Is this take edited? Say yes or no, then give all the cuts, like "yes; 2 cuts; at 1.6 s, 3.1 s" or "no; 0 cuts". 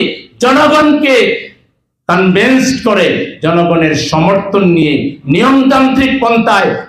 no; 0 cuts